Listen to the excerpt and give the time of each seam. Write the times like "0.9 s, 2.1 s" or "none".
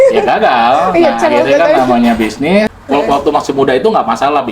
2.8 s